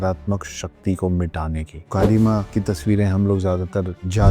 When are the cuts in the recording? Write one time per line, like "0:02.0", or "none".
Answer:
0:01.7
0:02.5